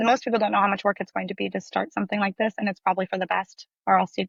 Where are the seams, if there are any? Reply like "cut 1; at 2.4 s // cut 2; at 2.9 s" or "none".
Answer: none